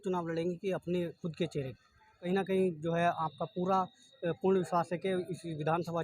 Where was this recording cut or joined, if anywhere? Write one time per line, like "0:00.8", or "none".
0:02.3